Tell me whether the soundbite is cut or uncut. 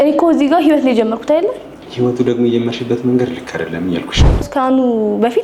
cut